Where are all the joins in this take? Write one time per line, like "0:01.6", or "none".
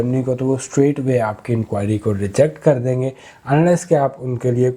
none